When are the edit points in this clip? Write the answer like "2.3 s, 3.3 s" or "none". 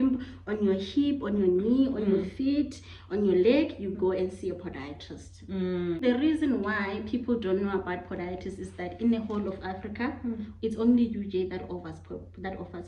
6.0 s